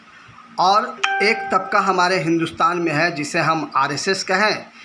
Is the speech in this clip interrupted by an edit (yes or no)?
no